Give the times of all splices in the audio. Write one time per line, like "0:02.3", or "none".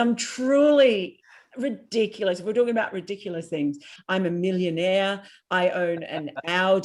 0:03.9

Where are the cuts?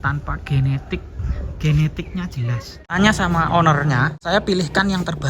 0:02.9
0:04.2

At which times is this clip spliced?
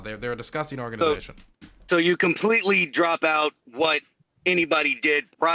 none

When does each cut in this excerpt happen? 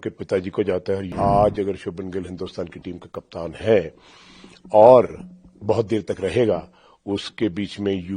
0:01.1

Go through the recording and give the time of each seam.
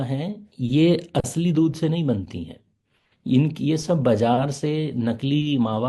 none

